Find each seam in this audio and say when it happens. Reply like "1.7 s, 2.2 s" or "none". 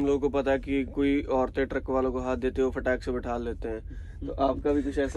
none